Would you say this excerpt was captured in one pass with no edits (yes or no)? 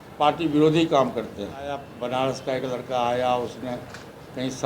no